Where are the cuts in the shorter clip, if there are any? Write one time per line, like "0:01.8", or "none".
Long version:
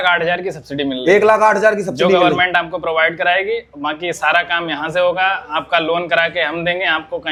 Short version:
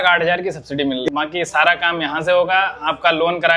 0:01.0